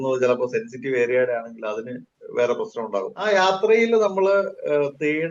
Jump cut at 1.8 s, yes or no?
no